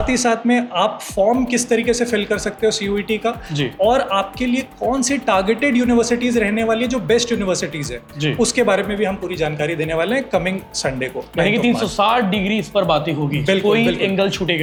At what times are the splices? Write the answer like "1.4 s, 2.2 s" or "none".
none